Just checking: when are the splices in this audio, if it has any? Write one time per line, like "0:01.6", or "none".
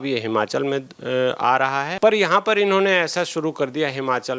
0:01.9